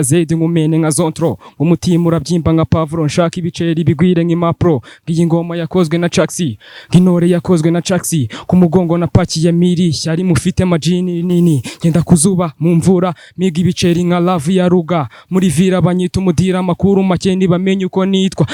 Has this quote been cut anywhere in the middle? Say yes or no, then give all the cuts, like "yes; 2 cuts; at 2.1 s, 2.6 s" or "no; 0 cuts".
no; 0 cuts